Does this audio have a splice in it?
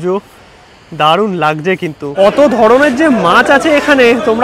yes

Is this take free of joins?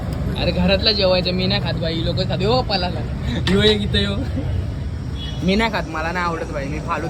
yes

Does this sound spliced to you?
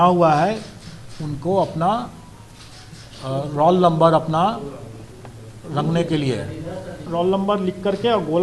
yes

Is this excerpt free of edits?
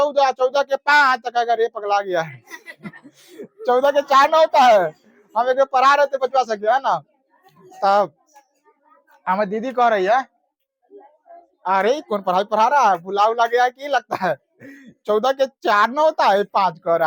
yes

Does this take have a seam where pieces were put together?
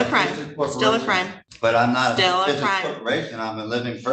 yes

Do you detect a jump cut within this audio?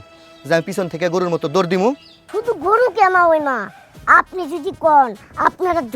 yes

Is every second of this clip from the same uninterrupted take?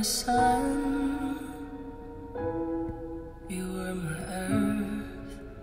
yes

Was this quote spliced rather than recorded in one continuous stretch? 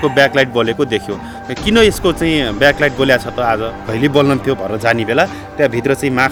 no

